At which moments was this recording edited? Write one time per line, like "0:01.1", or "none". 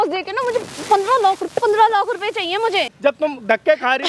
0:02.9

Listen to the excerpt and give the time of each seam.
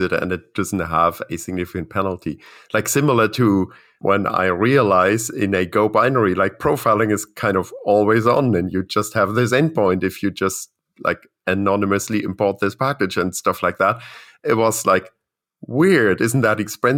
none

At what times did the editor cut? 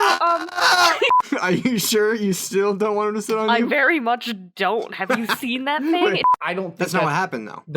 0:01.2
0:06.2

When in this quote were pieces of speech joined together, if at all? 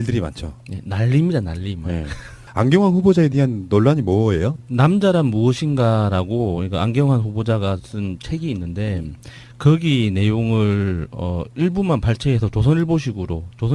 none

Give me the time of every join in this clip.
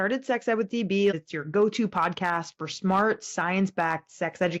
0:01.1

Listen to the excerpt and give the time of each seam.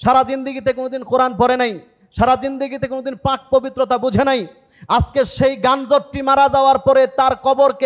none

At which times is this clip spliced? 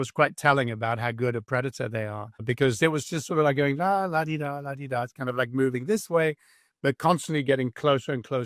none

